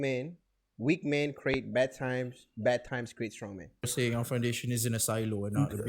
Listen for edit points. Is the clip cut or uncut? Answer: cut